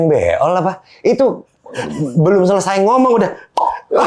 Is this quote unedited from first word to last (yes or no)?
yes